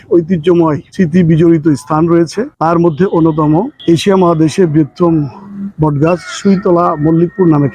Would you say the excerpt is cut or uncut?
cut